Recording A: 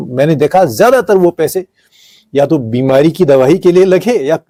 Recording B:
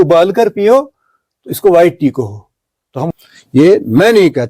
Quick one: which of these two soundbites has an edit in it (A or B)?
B